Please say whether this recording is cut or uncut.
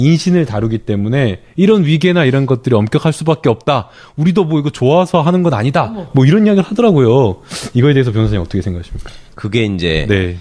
uncut